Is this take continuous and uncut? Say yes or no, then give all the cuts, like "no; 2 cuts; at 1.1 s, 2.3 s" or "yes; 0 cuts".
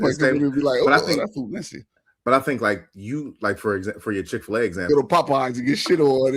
no; 1 cut; at 5.3 s